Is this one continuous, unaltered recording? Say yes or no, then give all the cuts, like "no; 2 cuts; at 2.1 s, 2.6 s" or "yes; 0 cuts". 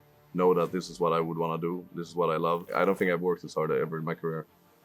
no; 1 cut; at 2.7 s